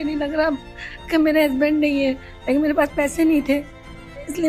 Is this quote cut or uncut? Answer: cut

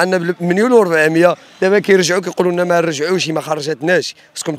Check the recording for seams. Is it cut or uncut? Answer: uncut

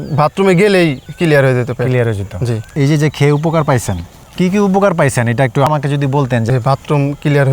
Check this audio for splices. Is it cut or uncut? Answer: uncut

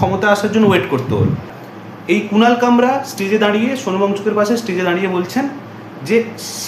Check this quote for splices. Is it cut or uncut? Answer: cut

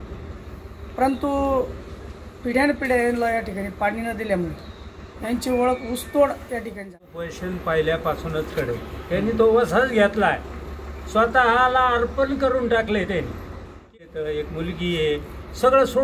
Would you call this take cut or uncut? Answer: cut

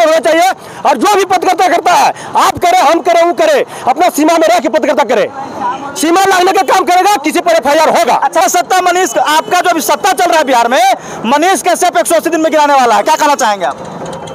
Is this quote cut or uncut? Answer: cut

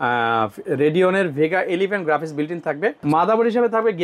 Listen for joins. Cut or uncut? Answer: cut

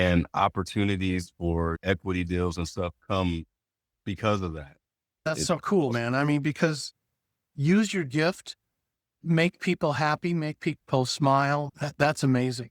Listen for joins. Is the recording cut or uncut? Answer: cut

